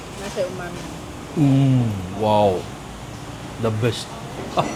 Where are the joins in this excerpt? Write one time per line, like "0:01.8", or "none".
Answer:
none